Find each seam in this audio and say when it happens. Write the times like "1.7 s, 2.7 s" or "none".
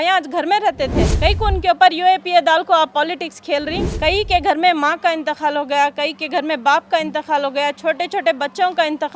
1.1 s, 3.8 s